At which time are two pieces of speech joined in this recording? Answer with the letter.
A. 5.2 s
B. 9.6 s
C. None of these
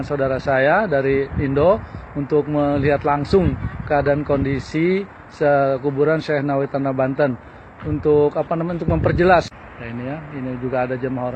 B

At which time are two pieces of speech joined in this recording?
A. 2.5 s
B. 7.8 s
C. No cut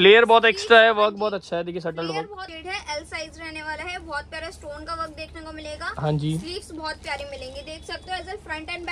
A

